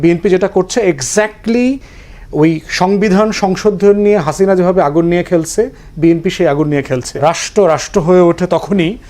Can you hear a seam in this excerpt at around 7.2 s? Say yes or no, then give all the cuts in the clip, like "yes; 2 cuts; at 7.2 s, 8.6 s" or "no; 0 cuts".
yes; 1 cut; at 7.2 s